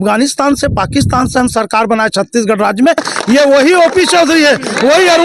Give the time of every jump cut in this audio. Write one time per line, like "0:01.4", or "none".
0:03.1